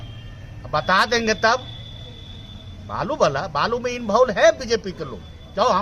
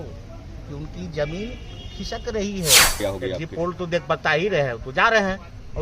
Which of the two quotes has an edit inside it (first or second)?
second